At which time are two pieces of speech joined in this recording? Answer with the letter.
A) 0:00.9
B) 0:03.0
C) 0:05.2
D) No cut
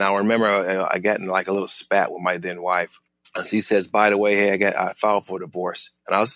B